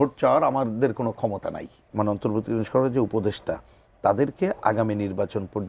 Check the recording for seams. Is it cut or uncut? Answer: cut